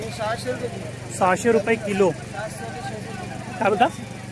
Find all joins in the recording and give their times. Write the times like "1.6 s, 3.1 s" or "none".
none